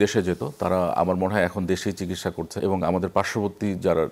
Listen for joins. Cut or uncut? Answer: cut